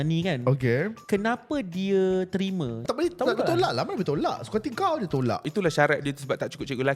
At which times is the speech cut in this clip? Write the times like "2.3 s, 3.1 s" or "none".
1.0 s, 2.8 s, 5.5 s